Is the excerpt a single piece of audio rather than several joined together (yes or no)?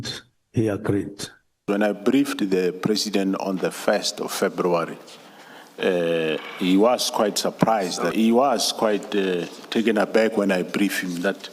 no